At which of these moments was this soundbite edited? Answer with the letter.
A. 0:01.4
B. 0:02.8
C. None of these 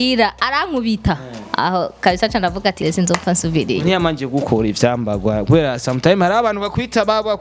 B